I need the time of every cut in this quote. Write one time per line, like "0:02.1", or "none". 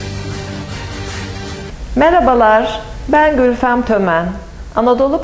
0:01.6